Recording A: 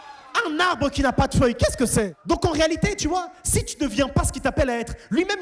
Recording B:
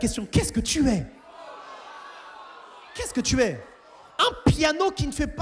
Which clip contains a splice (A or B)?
A